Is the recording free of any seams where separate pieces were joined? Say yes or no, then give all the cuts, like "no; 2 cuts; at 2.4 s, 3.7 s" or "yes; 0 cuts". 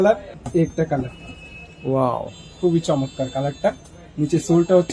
yes; 0 cuts